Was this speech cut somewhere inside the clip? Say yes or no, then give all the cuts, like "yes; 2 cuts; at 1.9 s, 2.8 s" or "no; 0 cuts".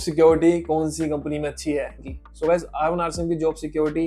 yes; 1 cut; at 2.0 s